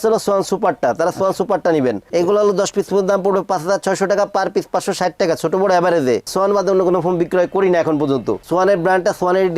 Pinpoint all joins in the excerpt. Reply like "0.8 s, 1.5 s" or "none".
6.3 s, 8.4 s